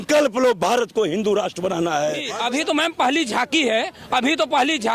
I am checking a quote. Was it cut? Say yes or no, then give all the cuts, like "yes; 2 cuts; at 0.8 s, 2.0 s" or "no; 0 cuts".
yes; 1 cut; at 2.3 s